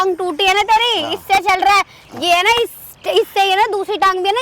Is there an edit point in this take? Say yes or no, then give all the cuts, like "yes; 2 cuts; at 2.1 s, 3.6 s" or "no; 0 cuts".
no; 0 cuts